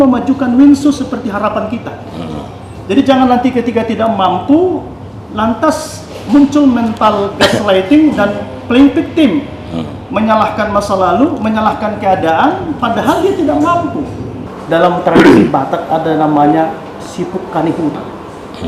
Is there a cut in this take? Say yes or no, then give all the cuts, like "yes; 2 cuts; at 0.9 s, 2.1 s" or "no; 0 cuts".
yes; 1 cut; at 14.4 s